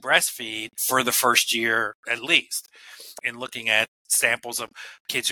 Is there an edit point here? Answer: yes; 3 cuts; at 0.8 s, 3.2 s, 4.0 s

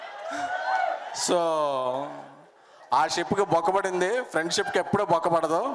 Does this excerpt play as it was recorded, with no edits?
yes; 0 cuts

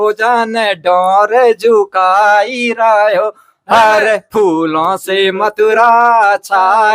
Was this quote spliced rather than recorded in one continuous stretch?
no; 0 cuts

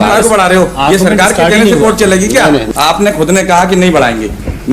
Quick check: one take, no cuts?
no; 1 cut; at 2.7 s

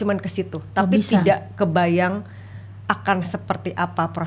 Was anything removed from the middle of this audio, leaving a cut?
no; 0 cuts

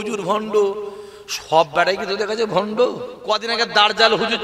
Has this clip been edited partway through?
yes; 1 cut; at 3.1 s

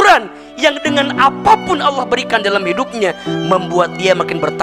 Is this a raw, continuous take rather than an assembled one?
yes; 0 cuts

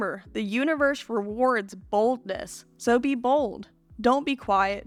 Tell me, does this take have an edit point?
no; 0 cuts

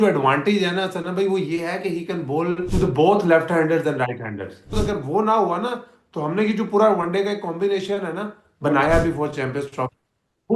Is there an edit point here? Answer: yes; 2 cuts; at 2.7 s, 4.8 s

